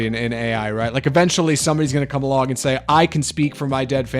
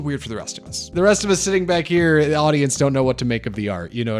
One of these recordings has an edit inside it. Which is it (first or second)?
second